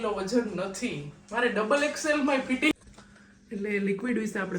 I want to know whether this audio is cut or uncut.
cut